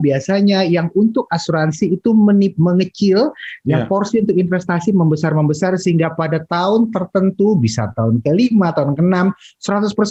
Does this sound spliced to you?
no; 0 cuts

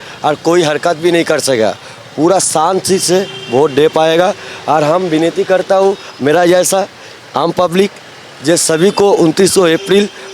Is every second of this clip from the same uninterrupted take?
yes; 0 cuts

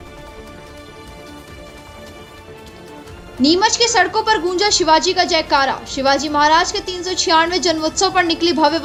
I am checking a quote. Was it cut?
no; 0 cuts

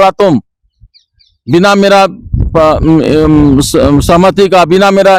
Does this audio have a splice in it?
no; 0 cuts

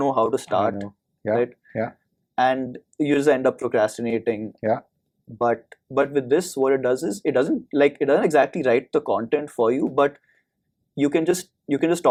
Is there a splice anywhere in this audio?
no; 0 cuts

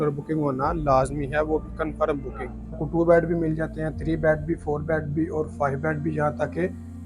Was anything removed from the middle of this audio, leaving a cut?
yes; 1 cut; at 2.8 s

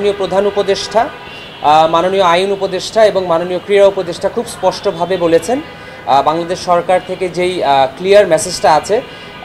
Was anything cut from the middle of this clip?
no; 0 cuts

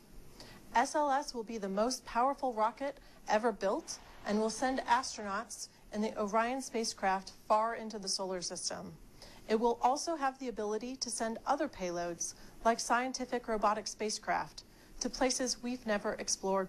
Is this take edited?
no; 0 cuts

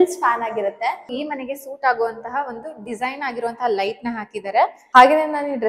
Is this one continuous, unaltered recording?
no; 2 cuts; at 1.1 s, 4.8 s

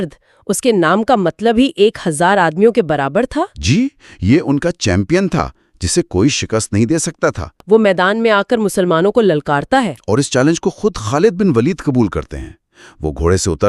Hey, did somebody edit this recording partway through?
yes; 1 cut; at 7.5 s

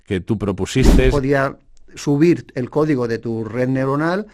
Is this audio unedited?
no; 1 cut; at 1.1 s

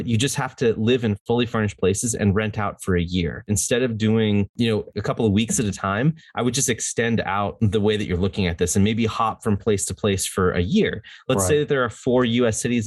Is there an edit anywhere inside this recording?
yes; 4 cuts; at 1.2 s, 3.5 s, 4.8 s, 7.5 s

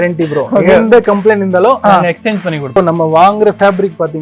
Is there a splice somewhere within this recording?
yes; 1 cut; at 2.8 s

